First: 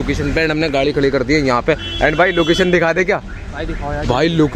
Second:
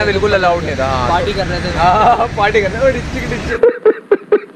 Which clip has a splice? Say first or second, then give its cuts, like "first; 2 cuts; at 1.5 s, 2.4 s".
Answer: second; 1 cut; at 3.5 s